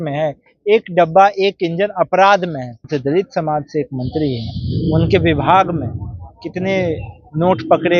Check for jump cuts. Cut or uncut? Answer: cut